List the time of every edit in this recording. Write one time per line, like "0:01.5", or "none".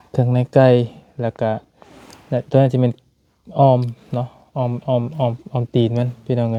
none